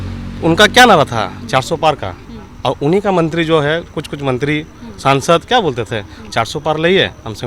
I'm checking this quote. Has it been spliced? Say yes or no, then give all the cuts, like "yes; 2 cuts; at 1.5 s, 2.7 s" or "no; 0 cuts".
no; 0 cuts